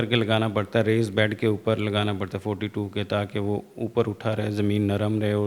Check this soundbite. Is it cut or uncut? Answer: uncut